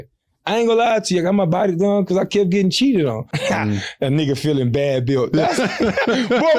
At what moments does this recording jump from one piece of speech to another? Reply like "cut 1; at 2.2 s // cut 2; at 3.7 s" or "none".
cut 1; at 3.3 s

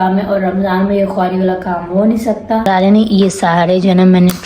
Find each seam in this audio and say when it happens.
cut 1; at 2.7 s

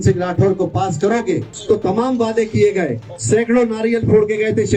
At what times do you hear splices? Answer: cut 1; at 1.5 s

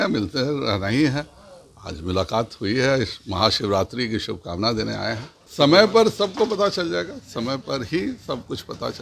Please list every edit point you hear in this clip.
cut 1; at 5.3 s

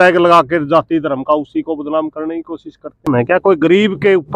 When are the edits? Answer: cut 1; at 3.1 s

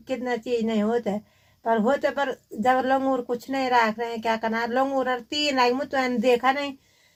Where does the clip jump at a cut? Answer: none

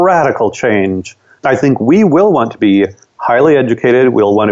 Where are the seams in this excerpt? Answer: none

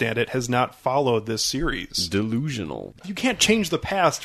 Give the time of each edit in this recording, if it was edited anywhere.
cut 1; at 3.1 s

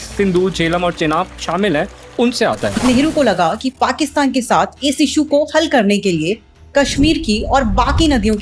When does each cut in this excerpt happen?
cut 1; at 2.8 s

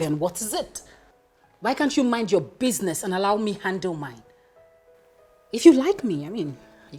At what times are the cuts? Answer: none

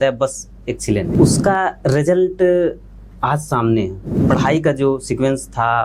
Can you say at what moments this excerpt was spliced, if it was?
cut 1; at 1.1 s // cut 2; at 4.1 s

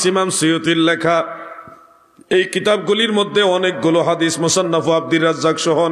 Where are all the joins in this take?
none

